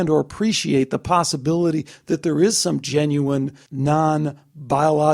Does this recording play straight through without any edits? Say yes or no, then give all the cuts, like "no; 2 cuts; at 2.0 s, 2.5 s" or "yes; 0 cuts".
no; 1 cut; at 3.6 s